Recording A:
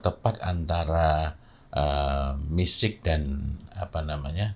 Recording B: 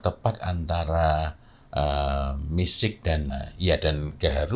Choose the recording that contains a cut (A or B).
B